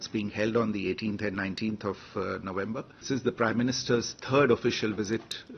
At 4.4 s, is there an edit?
no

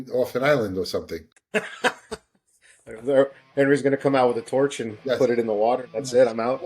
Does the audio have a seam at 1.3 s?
yes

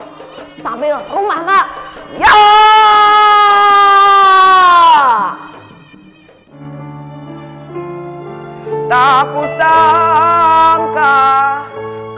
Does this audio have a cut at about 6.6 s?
yes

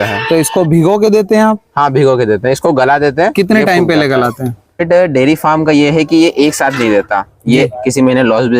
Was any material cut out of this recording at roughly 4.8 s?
yes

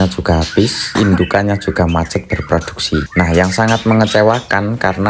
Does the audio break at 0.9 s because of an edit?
yes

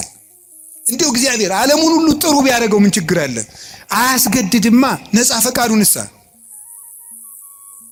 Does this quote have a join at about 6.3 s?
no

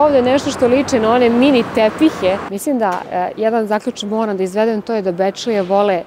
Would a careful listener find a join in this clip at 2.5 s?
yes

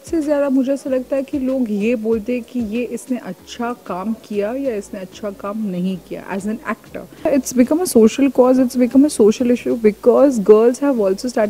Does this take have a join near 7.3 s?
yes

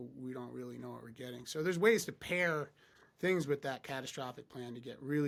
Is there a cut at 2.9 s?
no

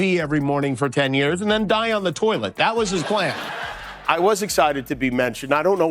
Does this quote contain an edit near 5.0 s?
no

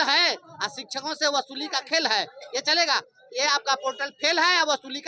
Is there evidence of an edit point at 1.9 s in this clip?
no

